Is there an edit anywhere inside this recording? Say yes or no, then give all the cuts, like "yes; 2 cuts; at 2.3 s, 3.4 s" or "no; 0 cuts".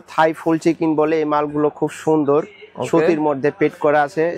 no; 0 cuts